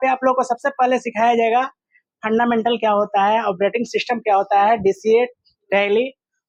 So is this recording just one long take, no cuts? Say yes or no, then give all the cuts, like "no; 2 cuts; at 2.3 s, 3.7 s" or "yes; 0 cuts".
yes; 0 cuts